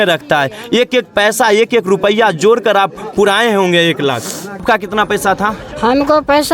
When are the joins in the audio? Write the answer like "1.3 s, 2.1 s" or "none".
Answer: 4.6 s